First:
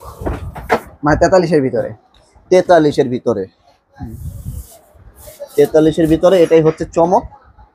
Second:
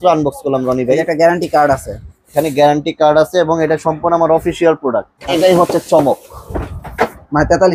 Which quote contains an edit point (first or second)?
second